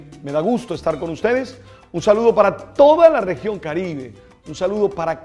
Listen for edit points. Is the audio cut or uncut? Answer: uncut